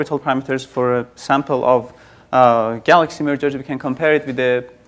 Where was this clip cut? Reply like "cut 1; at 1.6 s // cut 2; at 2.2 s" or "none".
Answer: cut 1; at 3.8 s